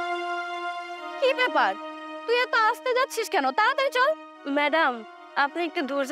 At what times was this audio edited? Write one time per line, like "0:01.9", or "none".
0:01.1